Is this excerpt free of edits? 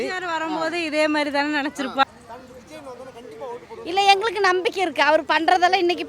no; 1 cut; at 2.0 s

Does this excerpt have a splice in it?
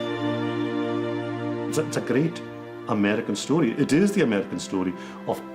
yes; 1 cut; at 1.7 s

